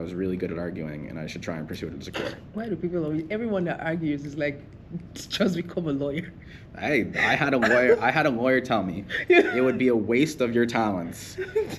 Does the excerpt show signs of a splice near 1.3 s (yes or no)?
no